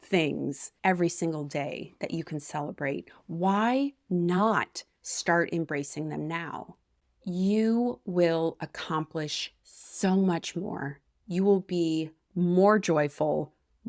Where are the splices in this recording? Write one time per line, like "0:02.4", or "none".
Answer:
0:07.0